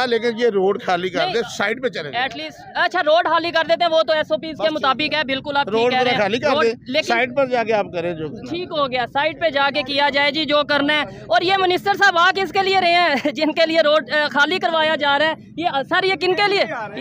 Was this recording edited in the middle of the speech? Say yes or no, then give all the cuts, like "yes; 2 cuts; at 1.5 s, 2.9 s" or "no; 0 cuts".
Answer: no; 0 cuts